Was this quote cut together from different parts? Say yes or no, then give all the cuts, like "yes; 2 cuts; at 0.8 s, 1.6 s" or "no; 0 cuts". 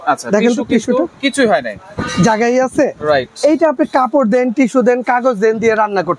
no; 0 cuts